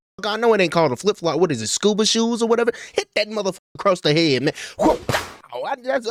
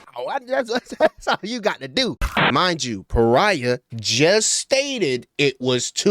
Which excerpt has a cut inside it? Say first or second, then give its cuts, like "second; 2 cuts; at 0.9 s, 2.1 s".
second; 1 cut; at 2.4 s